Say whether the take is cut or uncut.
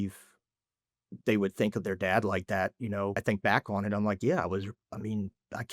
cut